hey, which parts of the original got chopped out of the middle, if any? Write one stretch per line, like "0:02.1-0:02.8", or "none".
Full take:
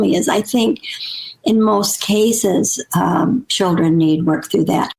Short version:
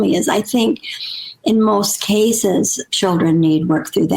0:02.9-0:03.5